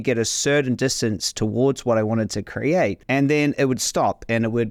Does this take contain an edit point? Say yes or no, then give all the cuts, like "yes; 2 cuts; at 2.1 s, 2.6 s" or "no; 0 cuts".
yes; 1 cut; at 3.0 s